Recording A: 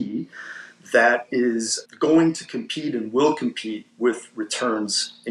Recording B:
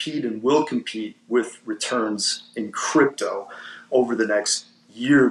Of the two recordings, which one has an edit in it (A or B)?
A